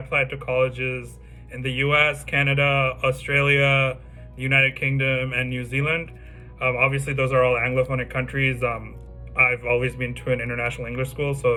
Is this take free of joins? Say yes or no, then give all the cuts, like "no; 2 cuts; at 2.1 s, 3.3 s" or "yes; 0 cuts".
yes; 0 cuts